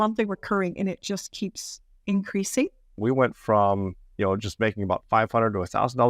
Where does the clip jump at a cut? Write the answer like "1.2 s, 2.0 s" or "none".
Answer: 3.0 s